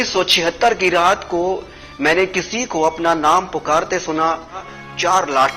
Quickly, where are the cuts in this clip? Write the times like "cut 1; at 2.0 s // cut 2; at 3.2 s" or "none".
cut 1; at 4.6 s